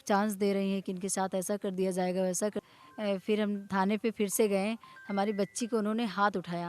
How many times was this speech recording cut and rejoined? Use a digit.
1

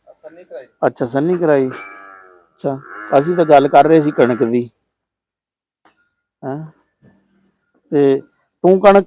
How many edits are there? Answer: 0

